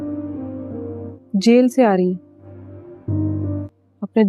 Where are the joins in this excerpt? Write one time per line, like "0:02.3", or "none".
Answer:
0:01.1